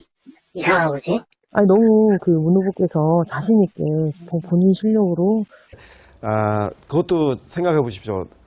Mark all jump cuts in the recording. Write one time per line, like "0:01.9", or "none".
none